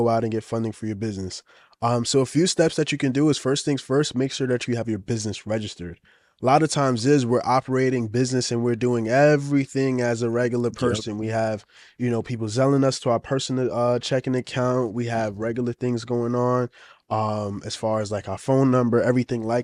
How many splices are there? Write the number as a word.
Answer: zero